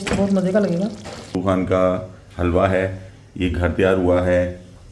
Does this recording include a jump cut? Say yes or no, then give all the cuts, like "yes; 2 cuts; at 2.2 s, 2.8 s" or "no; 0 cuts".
yes; 1 cut; at 1.3 s